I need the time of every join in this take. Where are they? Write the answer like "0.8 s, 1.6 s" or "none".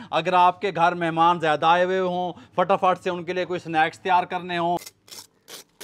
4.9 s